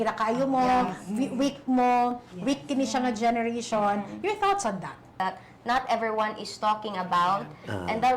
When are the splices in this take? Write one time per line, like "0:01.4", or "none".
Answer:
0:05.1

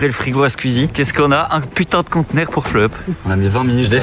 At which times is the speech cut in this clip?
0:03.1

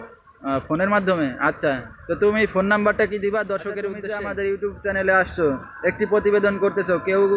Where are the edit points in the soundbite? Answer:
0:04.0

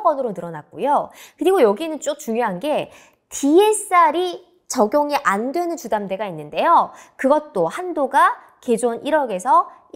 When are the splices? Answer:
none

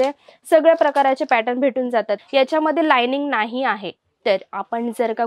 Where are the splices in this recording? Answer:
0:02.2

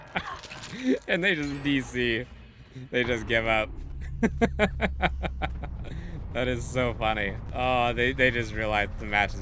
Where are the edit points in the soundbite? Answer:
0:07.4

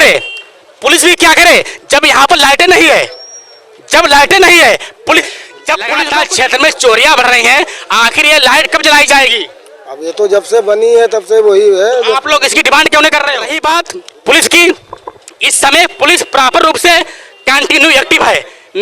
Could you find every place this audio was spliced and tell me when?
0:05.9
0:13.5

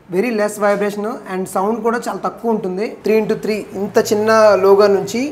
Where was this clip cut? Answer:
0:02.9

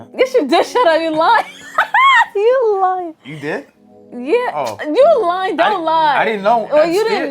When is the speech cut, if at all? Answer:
none

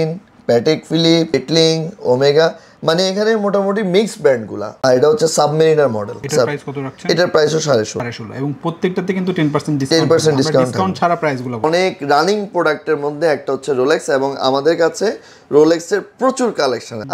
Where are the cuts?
0:04.8
0:11.6

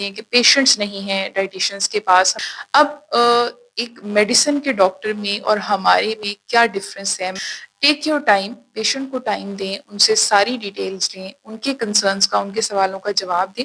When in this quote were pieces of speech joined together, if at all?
0:02.4
0:07.4

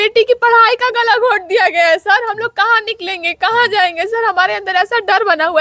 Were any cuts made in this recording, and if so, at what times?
none

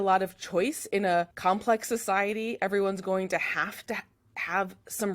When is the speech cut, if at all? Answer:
0:01.3

